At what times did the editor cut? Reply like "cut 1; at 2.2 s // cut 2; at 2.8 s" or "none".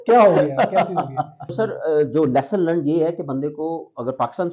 cut 1; at 1.4 s

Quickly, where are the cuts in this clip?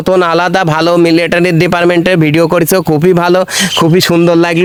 none

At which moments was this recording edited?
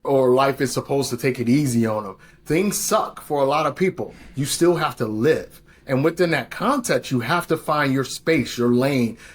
none

